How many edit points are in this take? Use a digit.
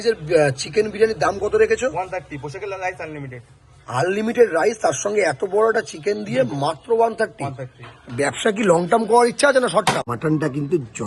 1